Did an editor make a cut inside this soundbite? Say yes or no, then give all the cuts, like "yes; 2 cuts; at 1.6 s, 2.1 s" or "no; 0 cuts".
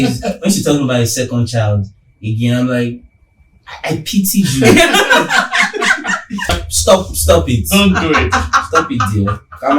yes; 1 cut; at 6.6 s